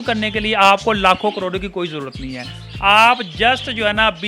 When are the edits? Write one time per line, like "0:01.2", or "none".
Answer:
none

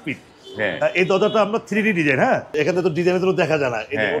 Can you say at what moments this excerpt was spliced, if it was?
0:02.5

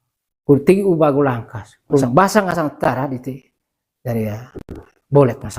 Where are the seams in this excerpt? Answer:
0:02.0

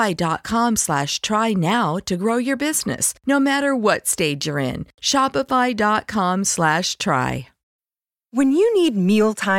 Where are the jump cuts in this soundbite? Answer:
0:07.6

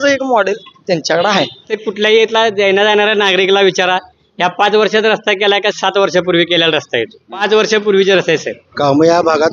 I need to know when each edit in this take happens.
0:01.8
0:07.4
0:08.6

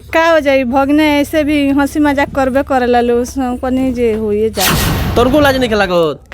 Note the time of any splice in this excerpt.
0:05.1

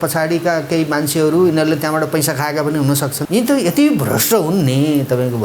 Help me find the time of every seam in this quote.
0:03.2

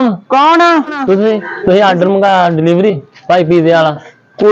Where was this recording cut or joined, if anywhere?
0:01.5

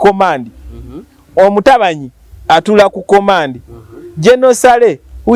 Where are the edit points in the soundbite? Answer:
none

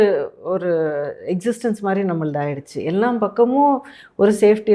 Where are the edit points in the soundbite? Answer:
none

